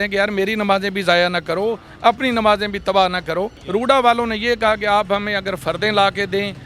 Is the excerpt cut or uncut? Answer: cut